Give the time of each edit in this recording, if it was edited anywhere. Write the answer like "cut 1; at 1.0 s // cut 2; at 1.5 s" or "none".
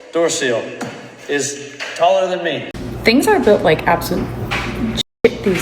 cut 1; at 2.8 s